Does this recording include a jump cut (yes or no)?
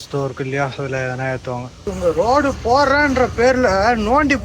yes